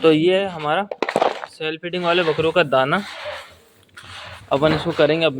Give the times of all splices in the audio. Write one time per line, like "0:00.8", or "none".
none